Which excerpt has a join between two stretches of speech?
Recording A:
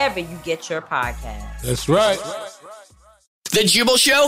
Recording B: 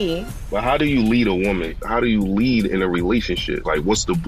A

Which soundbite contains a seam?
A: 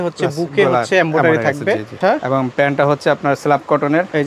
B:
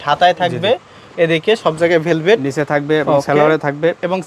A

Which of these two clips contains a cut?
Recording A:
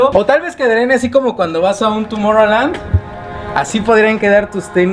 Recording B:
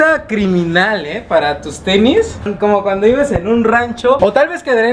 B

